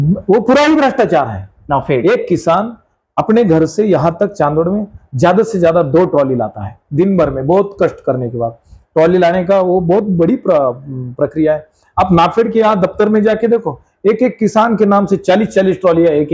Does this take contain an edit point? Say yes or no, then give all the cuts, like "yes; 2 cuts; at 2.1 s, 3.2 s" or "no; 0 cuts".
no; 0 cuts